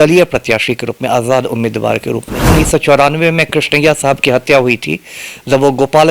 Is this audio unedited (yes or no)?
no